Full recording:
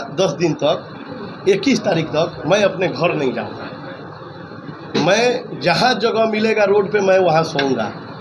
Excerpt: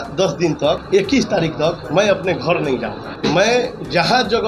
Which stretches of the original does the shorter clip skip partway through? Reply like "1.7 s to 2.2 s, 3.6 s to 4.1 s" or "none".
0.8 s to 1.4 s, 3.6 s to 4.8 s